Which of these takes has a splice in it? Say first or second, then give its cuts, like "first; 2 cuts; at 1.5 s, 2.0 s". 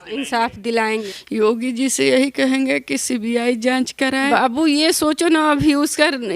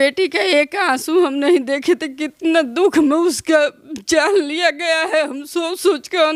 first; 2 cuts; at 1.1 s, 4.3 s